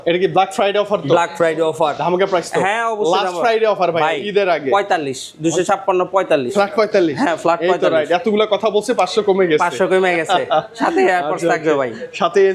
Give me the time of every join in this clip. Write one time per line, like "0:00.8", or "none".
none